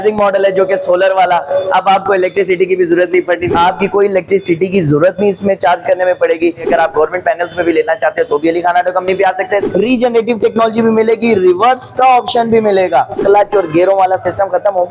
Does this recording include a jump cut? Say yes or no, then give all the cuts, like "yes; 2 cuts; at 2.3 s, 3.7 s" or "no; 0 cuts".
yes; 4 cuts; at 3.5 s, 6.7 s, 9.6 s, 13.2 s